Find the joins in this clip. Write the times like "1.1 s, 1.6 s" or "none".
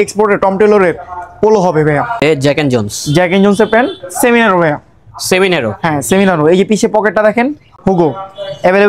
2.2 s, 7.7 s